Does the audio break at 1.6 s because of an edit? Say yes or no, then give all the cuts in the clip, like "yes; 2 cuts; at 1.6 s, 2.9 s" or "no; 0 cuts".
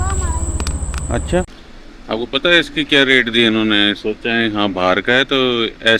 yes; 1 cut; at 1.6 s